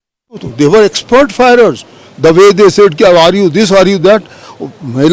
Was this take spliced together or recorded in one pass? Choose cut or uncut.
uncut